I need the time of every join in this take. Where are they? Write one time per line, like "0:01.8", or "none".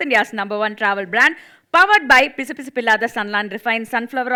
none

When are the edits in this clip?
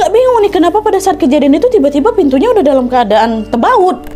none

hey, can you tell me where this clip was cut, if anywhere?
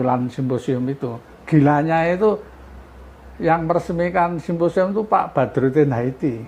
0:01.3

